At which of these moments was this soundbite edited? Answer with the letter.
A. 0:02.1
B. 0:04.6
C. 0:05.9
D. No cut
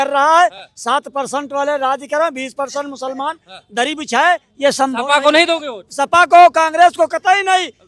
D